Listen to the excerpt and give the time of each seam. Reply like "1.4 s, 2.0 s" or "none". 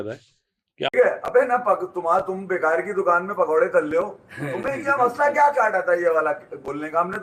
0.9 s